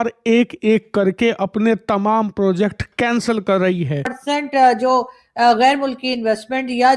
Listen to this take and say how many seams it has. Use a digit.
1